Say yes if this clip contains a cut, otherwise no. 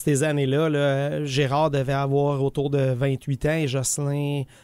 no